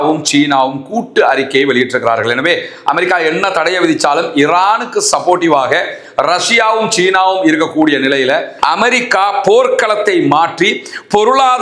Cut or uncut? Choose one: cut